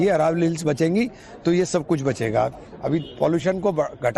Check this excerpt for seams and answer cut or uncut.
cut